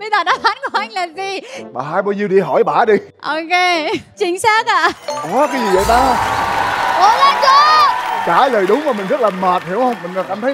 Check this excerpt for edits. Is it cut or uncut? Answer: uncut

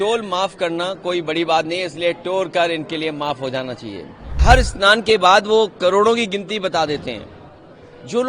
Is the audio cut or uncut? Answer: cut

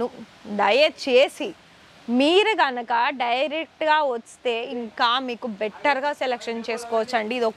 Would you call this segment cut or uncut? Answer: uncut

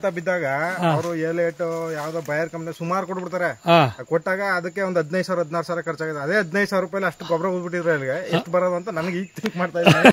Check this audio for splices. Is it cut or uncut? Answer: uncut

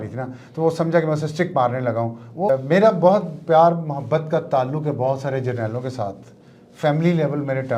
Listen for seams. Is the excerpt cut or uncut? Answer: cut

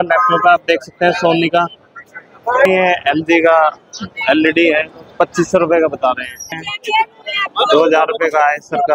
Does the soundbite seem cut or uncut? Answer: cut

